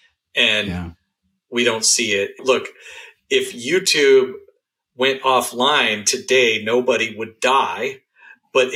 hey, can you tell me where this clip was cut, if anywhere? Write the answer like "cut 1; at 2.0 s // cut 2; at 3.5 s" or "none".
cut 1; at 2.3 s

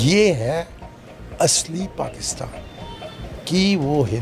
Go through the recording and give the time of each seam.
cut 1; at 3.2 s

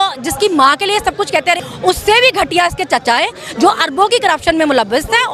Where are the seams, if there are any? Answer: cut 1; at 1.6 s

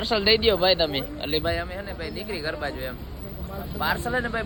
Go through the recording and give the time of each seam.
none

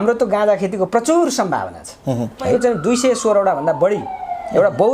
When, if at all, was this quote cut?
cut 1; at 2.5 s

